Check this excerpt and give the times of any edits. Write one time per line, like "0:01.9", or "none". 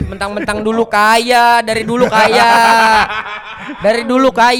none